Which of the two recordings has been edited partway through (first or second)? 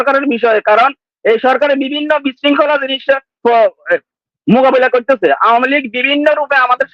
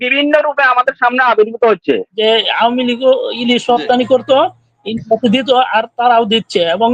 second